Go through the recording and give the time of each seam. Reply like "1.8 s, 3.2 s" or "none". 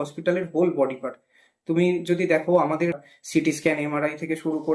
3.1 s